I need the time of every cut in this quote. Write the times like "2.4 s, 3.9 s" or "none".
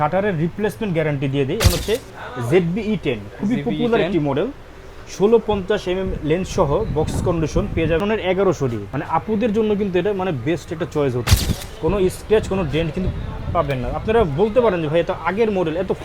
1.6 s, 8.0 s, 8.9 s, 11.3 s